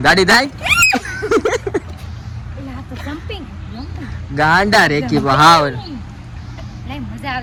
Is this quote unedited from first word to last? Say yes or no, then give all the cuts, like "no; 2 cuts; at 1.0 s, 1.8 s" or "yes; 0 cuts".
yes; 0 cuts